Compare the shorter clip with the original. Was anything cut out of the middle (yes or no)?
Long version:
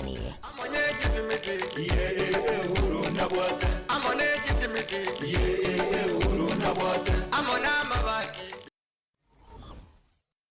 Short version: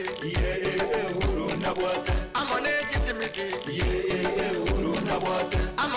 no